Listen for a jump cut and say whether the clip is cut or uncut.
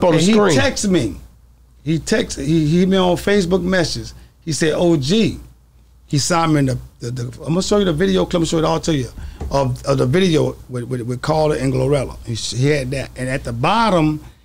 uncut